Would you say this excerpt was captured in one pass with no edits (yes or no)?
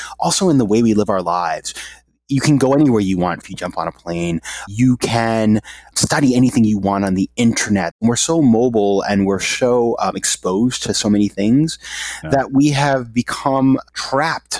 no